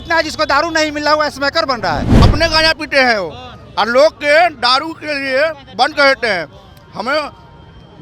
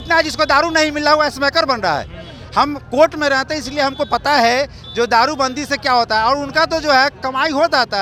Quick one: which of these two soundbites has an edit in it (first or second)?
first